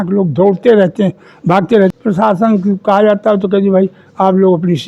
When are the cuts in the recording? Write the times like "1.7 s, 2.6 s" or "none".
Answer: 1.9 s